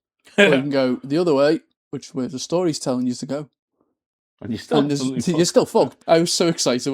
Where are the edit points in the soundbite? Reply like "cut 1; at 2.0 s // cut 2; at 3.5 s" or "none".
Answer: cut 1; at 5.9 s